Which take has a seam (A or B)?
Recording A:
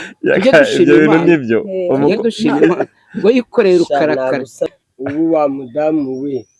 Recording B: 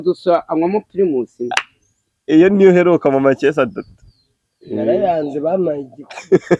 A